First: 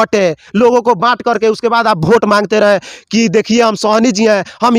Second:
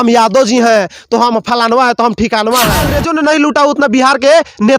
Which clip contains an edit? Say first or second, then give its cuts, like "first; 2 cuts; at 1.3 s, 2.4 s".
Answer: second; 1 cut; at 3.0 s